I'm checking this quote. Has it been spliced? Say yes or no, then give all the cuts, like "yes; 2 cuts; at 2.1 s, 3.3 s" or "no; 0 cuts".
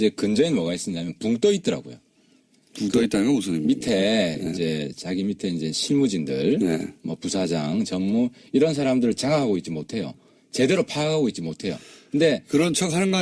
no; 0 cuts